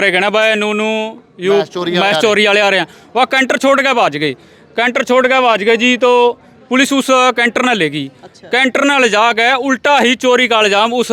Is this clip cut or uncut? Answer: uncut